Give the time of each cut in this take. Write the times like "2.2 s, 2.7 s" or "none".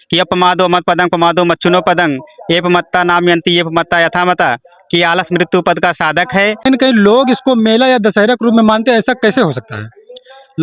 6.7 s